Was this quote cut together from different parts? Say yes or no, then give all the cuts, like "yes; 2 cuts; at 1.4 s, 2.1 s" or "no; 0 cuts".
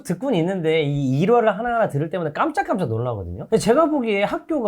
yes; 1 cut; at 3.4 s